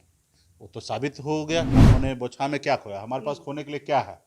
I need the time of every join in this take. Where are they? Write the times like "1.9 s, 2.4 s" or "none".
1.7 s